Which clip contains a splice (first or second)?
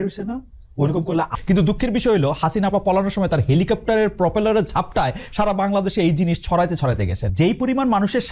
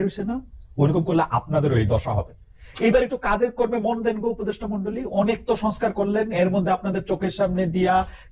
first